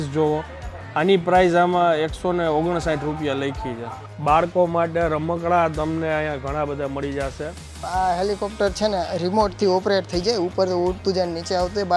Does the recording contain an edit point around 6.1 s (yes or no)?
no